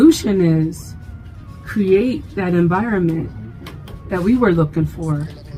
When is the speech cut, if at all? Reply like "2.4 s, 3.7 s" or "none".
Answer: none